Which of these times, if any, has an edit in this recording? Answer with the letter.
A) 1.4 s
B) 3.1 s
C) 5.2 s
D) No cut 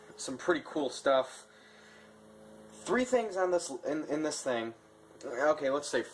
B